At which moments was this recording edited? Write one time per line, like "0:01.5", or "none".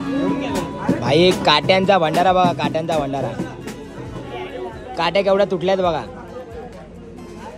none